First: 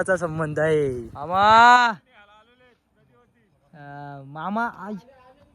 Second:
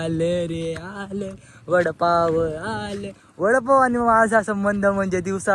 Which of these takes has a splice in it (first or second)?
first